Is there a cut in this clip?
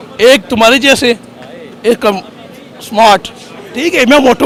no; 0 cuts

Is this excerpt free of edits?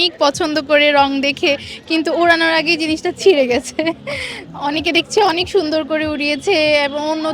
yes; 0 cuts

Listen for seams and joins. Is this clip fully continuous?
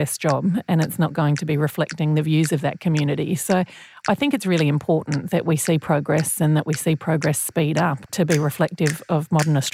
no; 1 cut; at 8.1 s

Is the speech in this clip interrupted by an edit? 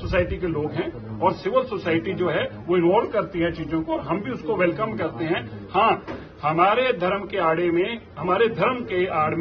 no; 0 cuts

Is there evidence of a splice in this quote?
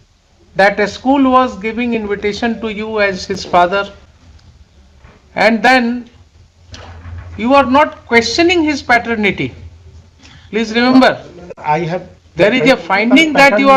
no; 0 cuts

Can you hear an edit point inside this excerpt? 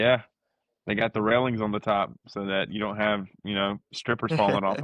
no; 0 cuts

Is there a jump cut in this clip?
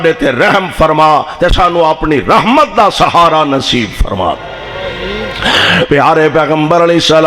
no; 0 cuts

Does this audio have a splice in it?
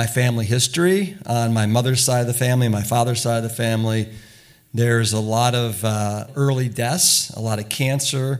yes; 1 cut; at 6.3 s

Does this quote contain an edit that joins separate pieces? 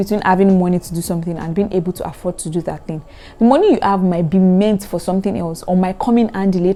no; 0 cuts

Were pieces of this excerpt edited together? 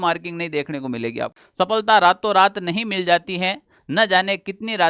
yes; 1 cut; at 1.3 s

